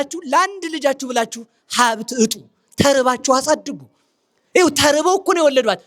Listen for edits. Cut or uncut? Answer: uncut